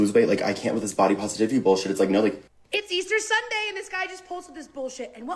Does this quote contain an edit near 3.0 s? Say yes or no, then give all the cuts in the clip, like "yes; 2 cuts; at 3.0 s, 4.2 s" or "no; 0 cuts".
yes; 1 cut; at 3.0 s